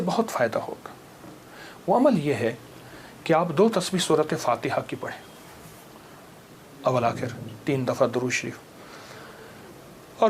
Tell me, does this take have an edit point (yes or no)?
no